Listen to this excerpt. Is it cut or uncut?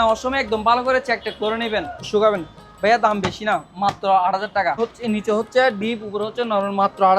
cut